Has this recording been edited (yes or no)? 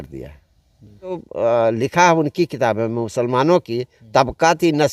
yes